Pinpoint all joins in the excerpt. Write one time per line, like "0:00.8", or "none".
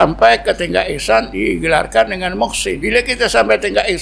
0:01.3
0:02.8